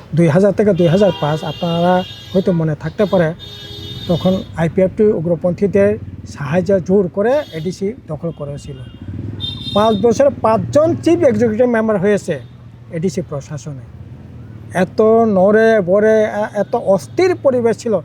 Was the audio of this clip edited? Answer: no; 0 cuts

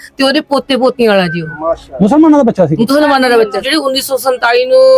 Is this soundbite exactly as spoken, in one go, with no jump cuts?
no; 1 cut; at 3.6 s

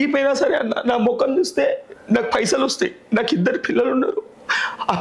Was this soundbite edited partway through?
no; 0 cuts

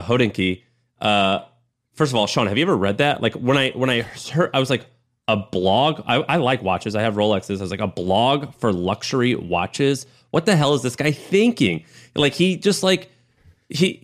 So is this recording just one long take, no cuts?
yes; 0 cuts

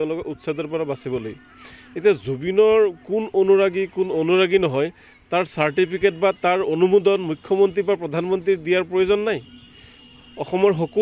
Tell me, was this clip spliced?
no; 0 cuts

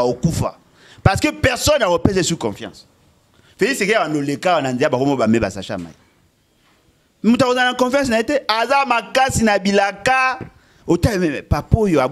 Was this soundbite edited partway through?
no; 0 cuts

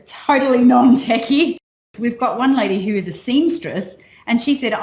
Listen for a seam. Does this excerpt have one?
yes; 1 cut; at 1.7 s

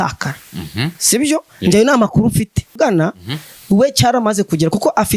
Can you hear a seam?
yes; 1 cut; at 2.8 s

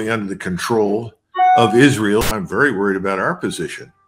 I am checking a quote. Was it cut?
yes; 1 cut; at 2.3 s

